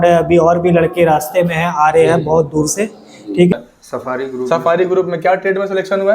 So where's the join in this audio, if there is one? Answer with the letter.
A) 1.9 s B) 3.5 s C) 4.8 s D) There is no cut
B